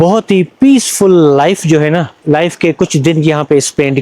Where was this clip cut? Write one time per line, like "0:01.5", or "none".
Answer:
0:02.1

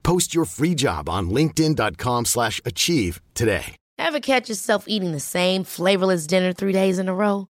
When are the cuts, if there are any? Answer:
0:03.8

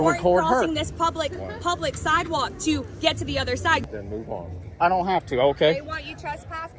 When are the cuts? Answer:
0:03.8

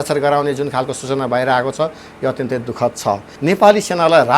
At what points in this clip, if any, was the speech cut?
0:03.3

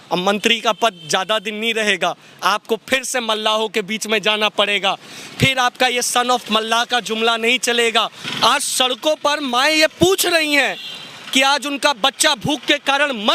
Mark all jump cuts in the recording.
0:08.2

